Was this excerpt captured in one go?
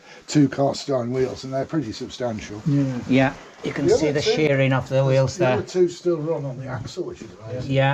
yes; 0 cuts

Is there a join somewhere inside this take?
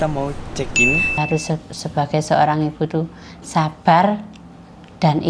yes; 1 cut; at 1.2 s

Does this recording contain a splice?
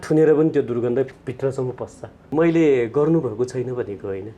yes; 1 cut; at 2.3 s

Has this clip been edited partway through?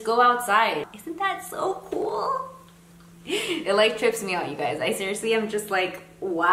yes; 1 cut; at 0.9 s

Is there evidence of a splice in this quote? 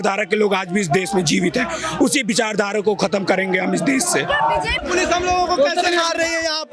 yes; 1 cut; at 4.7 s

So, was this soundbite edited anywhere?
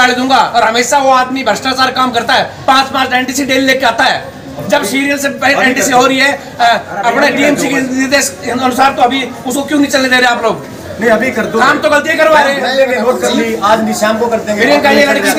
no; 0 cuts

